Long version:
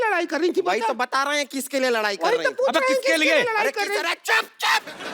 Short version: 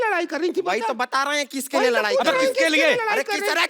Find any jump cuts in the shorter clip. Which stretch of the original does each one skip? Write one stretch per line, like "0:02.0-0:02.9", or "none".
0:02.0-0:02.5